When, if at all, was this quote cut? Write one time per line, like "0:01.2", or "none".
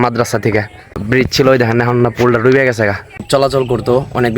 0:01.0
0:03.2